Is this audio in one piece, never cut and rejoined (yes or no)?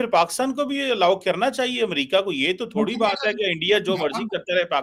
yes